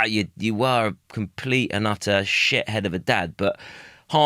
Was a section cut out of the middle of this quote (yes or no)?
no